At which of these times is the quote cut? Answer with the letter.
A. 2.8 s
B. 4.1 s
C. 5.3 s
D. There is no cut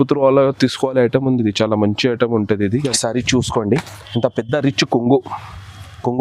A